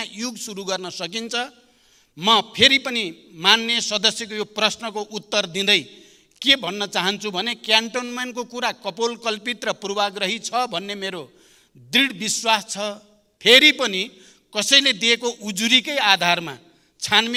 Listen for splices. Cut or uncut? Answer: uncut